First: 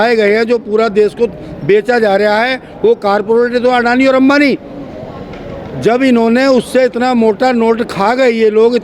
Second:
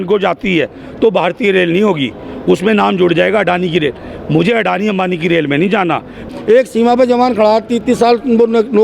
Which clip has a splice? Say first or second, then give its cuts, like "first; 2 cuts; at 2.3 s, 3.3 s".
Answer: second; 1 cut; at 6.2 s